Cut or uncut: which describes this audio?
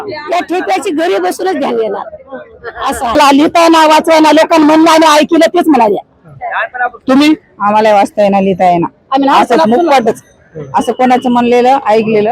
cut